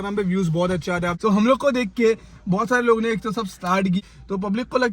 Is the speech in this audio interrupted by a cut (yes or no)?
yes